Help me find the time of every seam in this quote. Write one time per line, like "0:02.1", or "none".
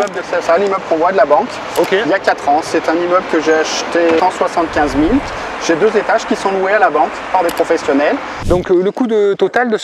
0:04.2
0:08.4